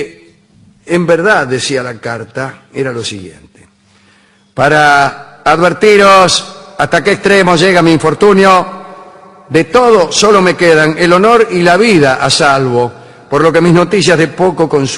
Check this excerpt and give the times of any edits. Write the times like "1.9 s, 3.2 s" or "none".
none